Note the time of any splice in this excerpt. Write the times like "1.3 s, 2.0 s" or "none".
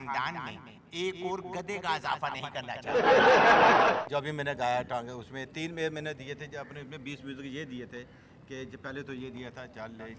2.8 s, 3.9 s